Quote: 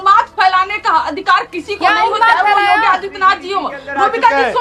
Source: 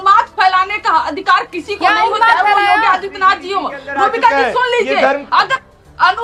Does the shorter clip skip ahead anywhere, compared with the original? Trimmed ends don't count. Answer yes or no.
no